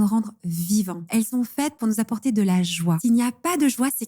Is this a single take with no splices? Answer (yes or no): no